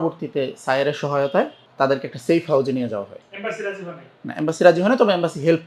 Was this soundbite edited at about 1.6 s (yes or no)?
yes